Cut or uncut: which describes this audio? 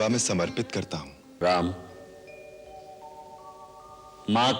cut